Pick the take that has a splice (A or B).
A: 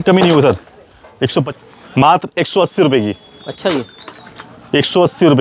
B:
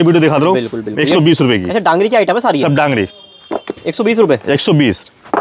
A